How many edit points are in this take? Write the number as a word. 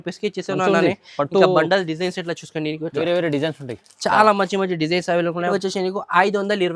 one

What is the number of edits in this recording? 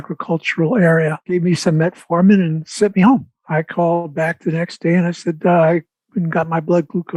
zero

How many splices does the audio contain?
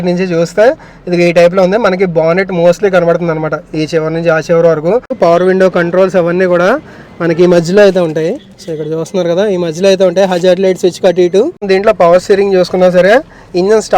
two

